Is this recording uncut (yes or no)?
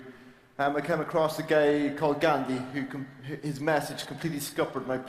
no